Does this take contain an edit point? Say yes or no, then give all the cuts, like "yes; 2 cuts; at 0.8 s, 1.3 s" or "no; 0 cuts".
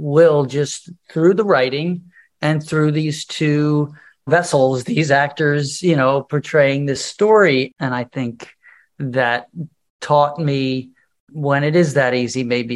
yes; 3 cuts; at 4.3 s, 7.1 s, 7.7 s